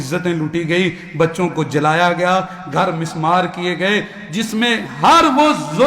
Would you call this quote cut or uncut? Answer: uncut